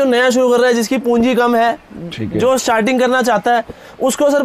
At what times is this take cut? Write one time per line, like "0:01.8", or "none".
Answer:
none